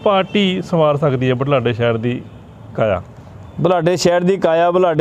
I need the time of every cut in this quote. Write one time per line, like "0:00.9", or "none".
none

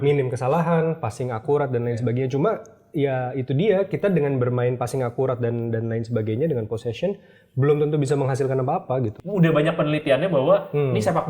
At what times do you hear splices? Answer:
0:09.2

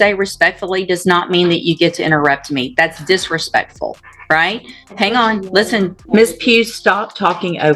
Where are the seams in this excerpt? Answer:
0:06.0

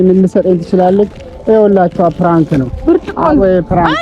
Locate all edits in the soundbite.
0:01.3
0:02.7

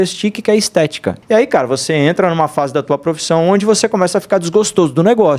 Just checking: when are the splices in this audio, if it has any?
0:01.1

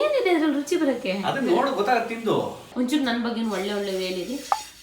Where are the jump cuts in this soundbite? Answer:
0:02.7

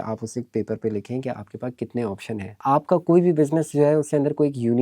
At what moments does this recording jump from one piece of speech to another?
0:02.5

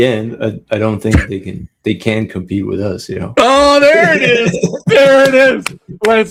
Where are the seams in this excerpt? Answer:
none

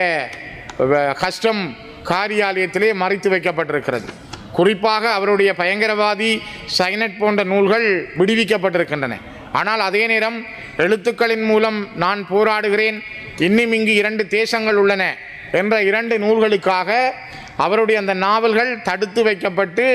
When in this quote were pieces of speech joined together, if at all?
none

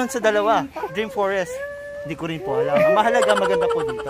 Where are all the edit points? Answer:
0:02.7

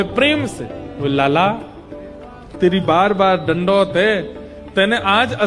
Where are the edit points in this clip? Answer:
none

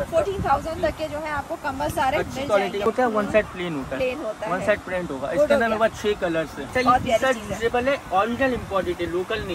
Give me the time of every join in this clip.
0:02.9
0:06.6

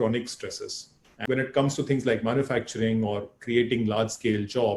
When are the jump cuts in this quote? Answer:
0:01.1

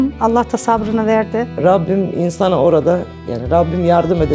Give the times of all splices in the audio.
none

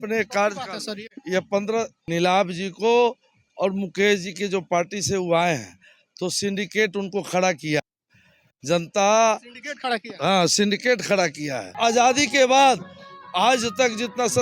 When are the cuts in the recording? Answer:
0:02.0
0:11.8

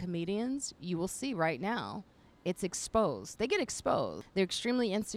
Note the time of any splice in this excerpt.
0:04.2

